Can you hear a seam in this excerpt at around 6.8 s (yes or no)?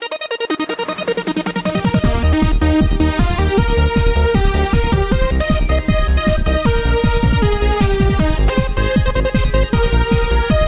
yes